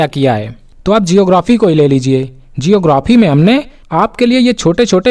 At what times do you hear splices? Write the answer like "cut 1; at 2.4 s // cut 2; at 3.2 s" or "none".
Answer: none